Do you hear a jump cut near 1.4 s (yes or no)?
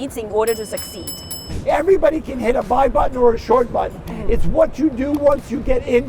yes